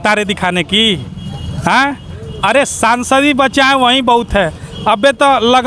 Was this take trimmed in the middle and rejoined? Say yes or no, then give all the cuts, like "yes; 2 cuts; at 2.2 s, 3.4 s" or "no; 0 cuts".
no; 0 cuts